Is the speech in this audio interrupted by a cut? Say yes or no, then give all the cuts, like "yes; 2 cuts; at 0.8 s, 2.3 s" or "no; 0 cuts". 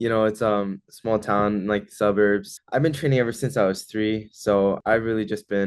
yes; 2 cuts; at 2.6 s, 4.8 s